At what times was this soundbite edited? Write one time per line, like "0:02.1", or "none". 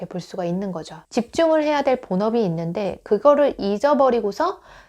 0:01.0